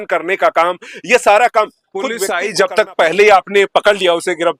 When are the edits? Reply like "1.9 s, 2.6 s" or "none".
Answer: 2.3 s